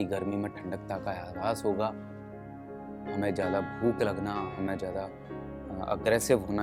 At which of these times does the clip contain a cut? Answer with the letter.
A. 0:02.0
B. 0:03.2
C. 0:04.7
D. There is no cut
D